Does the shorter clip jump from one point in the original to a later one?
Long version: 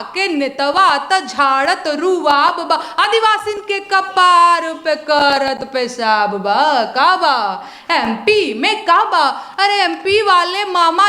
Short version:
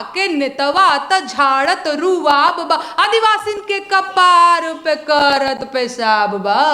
no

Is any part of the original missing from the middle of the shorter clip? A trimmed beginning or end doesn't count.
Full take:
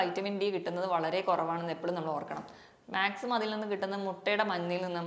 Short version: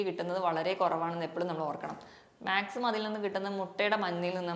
no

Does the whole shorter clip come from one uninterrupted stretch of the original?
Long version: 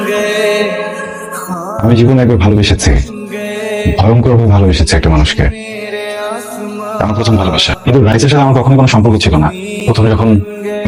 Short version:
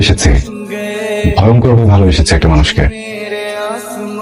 yes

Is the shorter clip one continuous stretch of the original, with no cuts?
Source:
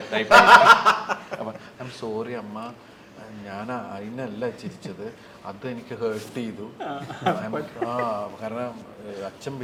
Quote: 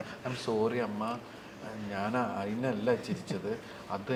yes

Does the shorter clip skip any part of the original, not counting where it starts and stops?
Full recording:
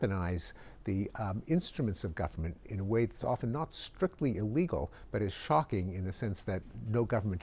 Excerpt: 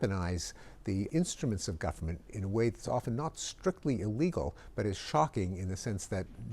yes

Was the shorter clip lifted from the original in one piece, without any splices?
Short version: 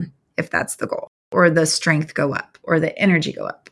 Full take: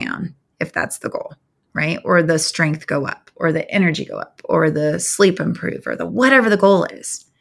no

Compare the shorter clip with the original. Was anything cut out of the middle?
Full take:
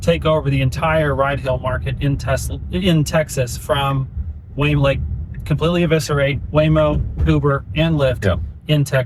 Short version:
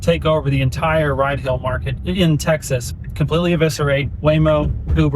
yes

